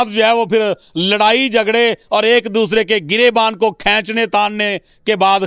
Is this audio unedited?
yes; 0 cuts

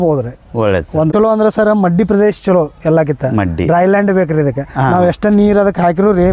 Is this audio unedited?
no; 1 cut; at 1.1 s

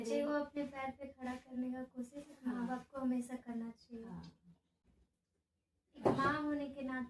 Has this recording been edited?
yes; 1 cut; at 4.8 s

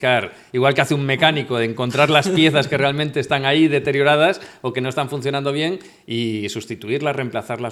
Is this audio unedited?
yes; 0 cuts

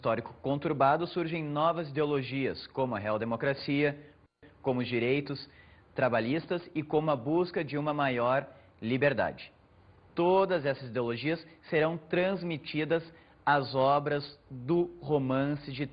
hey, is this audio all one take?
yes; 0 cuts

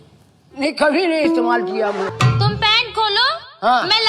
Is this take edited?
yes; 1 cut; at 2.1 s

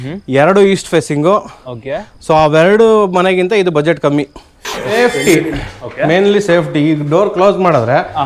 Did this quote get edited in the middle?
yes; 1 cut; at 4.9 s

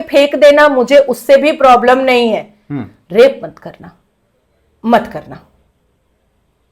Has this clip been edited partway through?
no; 0 cuts

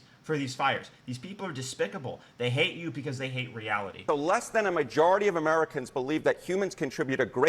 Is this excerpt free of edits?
no; 1 cut; at 4.0 s

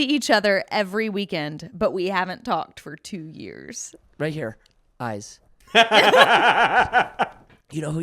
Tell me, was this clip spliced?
yes; 1 cut; at 4.0 s

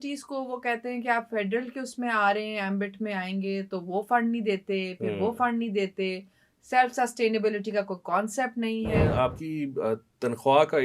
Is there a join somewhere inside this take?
yes; 1 cut; at 9.0 s

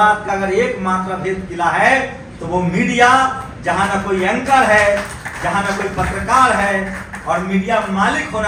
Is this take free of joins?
yes; 0 cuts

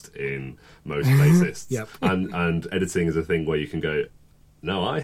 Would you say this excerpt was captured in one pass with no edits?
yes; 0 cuts

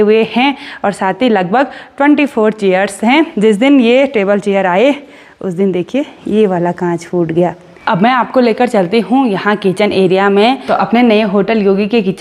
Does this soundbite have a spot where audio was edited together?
yes; 3 cuts; at 3.3 s, 7.8 s, 10.6 s

